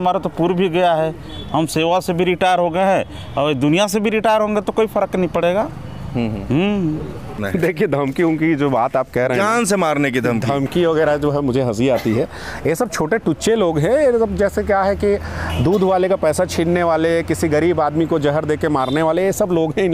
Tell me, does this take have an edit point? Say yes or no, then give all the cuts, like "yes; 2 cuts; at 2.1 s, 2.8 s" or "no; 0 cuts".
yes; 1 cut; at 7.4 s